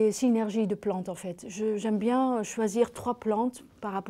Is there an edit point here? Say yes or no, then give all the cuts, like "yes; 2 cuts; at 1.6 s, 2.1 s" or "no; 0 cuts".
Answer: no; 0 cuts